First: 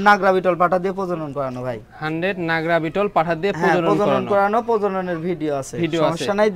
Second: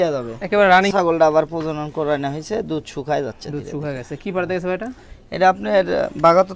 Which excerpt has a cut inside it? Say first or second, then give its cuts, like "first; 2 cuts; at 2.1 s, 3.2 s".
second; 1 cut; at 0.9 s